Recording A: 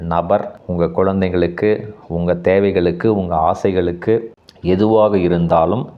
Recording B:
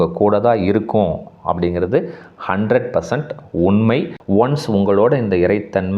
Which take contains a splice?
B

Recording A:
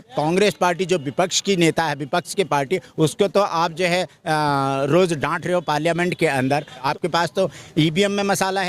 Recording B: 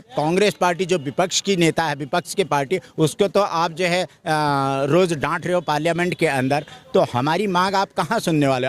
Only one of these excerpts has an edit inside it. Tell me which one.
A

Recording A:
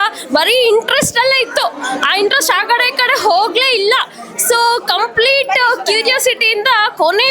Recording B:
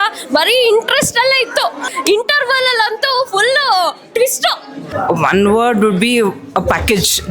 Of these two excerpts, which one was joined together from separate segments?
B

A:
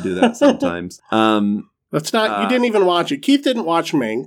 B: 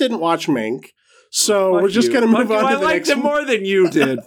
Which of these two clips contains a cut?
A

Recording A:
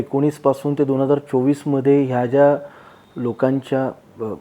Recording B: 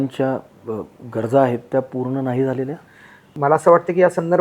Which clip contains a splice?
B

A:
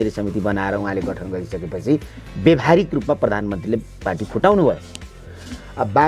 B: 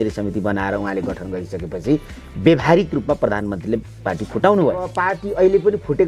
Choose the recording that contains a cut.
B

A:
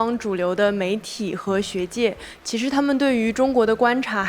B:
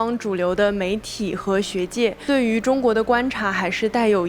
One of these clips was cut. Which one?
B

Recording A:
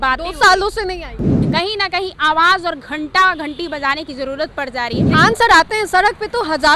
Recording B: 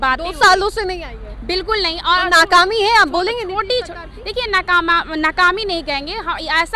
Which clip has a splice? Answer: A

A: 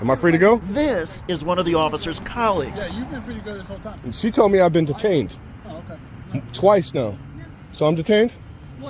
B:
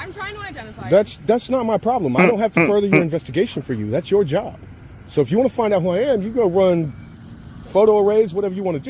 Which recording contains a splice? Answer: B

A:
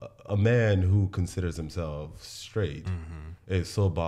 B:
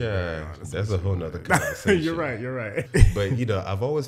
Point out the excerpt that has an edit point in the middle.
B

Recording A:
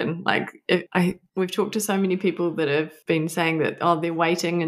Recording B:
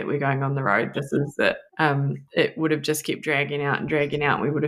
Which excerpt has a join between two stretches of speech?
B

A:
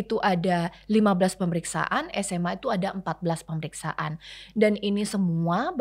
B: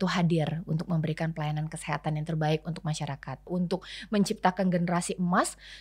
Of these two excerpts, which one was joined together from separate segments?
B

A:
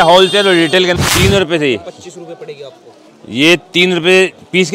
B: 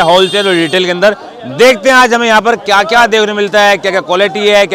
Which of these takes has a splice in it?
A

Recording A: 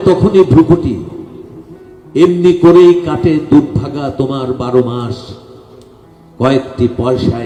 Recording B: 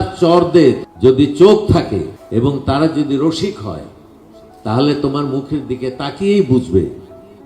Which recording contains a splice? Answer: B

